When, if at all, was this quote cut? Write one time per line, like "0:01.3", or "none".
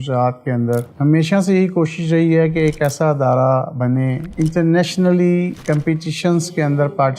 0:00.9
0:04.3